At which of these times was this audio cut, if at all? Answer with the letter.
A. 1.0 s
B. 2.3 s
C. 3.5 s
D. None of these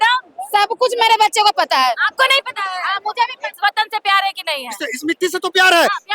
C